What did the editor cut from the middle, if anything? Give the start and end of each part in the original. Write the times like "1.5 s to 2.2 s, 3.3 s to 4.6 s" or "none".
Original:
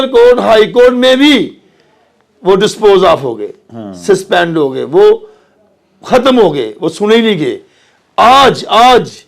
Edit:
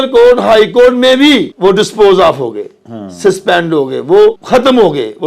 1.5 s to 2.3 s, 5.3 s to 6.0 s